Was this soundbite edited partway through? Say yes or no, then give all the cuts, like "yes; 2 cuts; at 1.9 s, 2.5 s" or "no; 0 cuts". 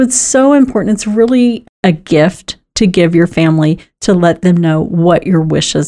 yes; 1 cut; at 1.7 s